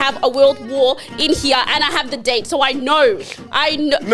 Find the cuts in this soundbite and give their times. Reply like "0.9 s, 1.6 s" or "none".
none